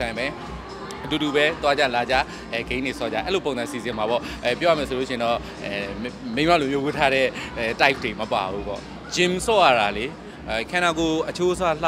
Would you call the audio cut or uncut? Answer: uncut